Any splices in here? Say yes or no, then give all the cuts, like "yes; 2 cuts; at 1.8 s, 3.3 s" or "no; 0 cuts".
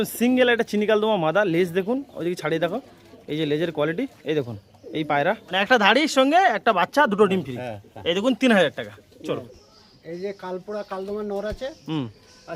yes; 2 cuts; at 5.5 s, 9.5 s